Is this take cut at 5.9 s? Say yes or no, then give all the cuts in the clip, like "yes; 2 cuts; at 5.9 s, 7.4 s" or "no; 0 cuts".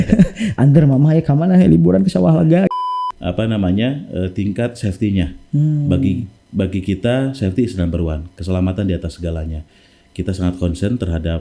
no; 1 cut; at 2.7 s